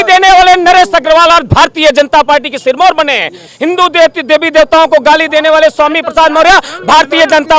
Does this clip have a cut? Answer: no; 0 cuts

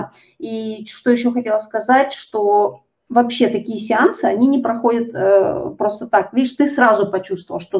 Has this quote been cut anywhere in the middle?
no; 0 cuts

